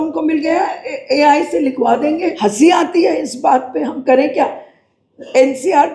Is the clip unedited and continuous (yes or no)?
no